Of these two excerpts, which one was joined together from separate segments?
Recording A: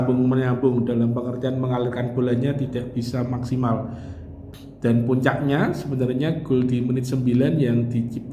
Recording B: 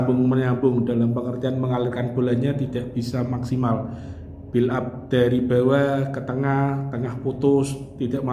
A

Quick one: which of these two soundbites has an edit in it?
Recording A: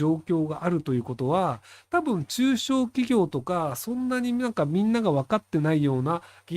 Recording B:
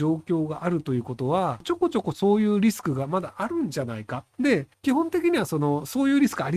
B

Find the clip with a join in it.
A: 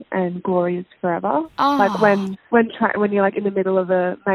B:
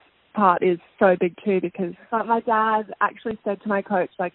B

